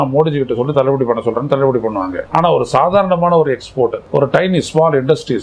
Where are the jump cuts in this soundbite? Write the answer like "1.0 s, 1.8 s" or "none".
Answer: 2.2 s, 4.0 s